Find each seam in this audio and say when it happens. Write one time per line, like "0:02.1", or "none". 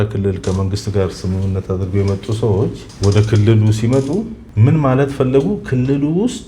0:02.9
0:04.4